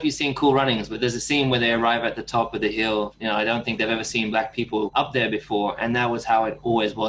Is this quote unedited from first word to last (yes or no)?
no